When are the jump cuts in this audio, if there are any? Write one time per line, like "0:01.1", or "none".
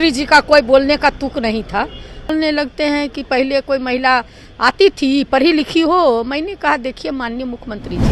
0:02.3